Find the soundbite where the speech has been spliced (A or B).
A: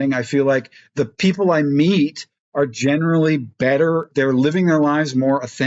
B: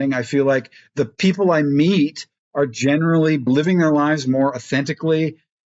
B